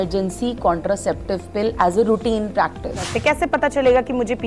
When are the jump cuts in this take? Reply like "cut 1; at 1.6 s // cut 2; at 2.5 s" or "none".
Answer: cut 1; at 3.1 s